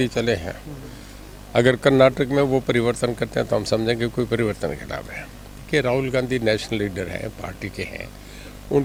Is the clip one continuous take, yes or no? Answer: yes